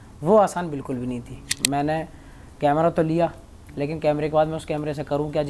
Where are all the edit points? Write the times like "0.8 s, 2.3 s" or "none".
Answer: 1.5 s